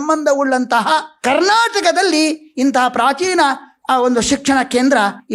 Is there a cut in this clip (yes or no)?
no